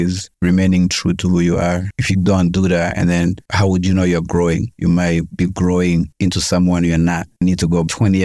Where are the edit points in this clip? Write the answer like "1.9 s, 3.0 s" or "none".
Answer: 7.3 s